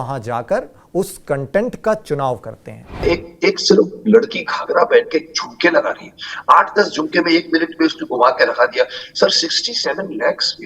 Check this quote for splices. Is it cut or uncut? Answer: cut